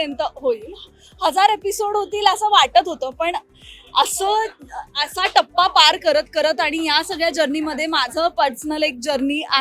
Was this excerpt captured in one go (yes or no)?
yes